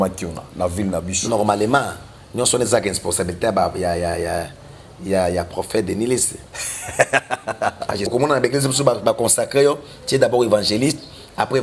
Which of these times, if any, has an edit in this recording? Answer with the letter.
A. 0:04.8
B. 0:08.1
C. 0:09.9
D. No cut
B